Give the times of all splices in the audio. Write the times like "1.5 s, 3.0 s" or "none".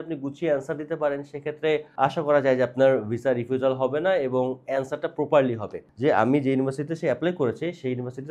5.8 s